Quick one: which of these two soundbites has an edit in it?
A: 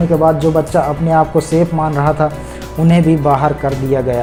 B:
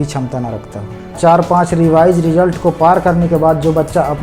B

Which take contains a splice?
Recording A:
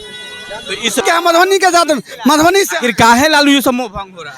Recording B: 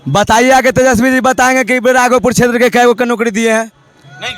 A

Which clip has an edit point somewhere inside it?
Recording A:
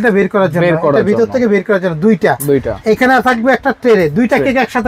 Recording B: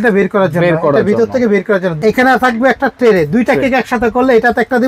B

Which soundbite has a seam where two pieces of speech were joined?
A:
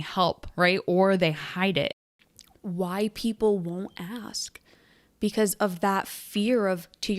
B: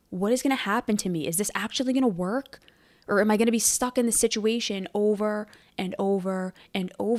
A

